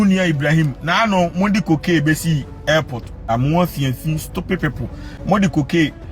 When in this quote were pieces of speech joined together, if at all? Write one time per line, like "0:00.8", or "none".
0:03.3